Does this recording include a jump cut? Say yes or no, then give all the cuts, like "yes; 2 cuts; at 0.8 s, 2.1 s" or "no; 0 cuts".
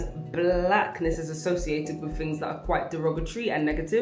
no; 0 cuts